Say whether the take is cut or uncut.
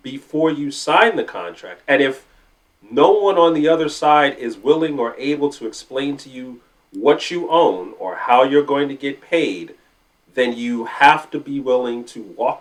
uncut